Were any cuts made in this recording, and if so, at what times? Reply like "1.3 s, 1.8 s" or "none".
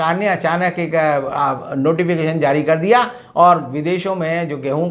none

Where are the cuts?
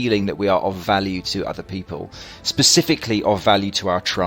none

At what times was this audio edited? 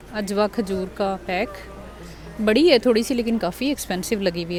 none

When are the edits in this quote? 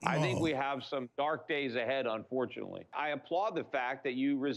2.9 s

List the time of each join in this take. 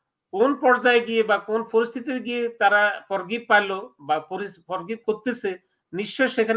none

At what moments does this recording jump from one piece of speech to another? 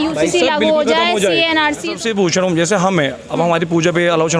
2.0 s

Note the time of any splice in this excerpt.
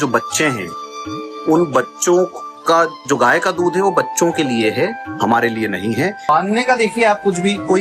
6.3 s

